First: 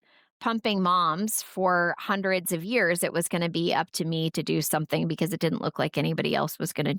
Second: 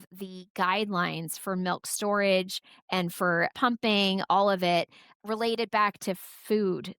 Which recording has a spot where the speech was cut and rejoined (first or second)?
second